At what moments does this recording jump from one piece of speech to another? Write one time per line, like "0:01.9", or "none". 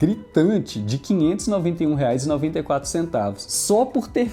none